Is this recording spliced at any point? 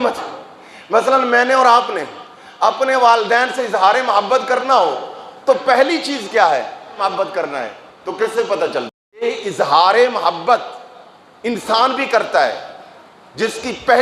yes; 2 cuts; at 7.0 s, 9.2 s

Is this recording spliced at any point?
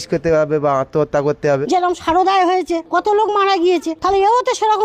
yes; 3 cuts; at 1.6 s, 2.8 s, 3.9 s

